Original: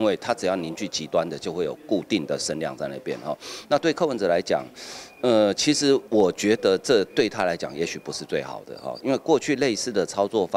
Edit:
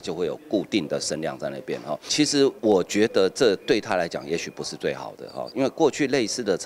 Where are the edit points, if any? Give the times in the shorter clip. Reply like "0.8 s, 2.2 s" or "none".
2.1 s